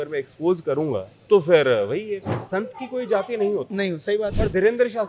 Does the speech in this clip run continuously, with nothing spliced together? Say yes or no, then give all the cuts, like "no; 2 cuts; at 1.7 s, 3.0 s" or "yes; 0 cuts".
no; 2 cuts; at 1.1 s, 2.4 s